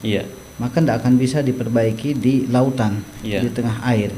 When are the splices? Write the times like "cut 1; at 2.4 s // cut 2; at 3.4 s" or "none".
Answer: none

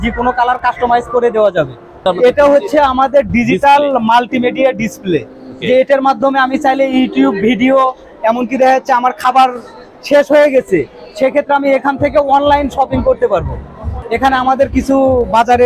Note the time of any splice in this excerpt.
cut 1; at 2.0 s

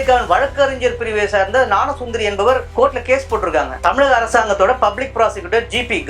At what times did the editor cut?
cut 1; at 2.7 s // cut 2; at 3.8 s

